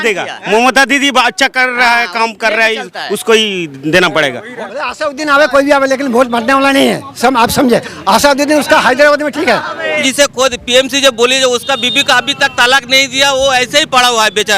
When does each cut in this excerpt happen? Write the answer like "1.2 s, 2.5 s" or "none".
4.7 s, 10.1 s